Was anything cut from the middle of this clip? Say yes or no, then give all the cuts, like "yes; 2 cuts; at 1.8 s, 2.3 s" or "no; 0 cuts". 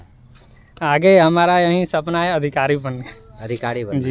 no; 0 cuts